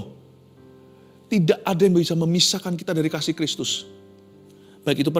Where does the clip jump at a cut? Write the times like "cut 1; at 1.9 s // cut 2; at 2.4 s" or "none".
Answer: none

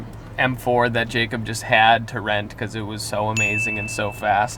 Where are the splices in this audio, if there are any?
none

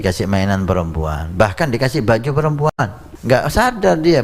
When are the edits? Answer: cut 1; at 3.1 s

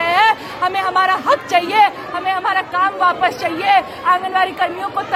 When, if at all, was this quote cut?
none

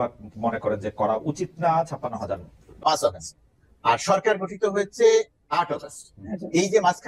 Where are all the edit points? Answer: cut 1; at 2.7 s

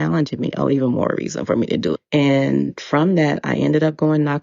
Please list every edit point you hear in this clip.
cut 1; at 2.0 s

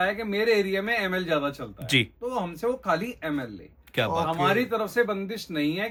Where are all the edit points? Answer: none

